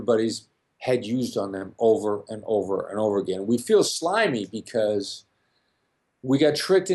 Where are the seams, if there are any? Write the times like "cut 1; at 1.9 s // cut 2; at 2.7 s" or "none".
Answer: none